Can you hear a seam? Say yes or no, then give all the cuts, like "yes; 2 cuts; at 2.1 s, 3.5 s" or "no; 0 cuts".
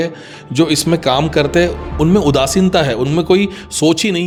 no; 0 cuts